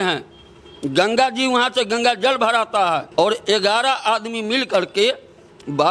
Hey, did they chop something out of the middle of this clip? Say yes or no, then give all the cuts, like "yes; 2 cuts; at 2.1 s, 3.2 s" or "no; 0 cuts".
yes; 1 cut; at 3.1 s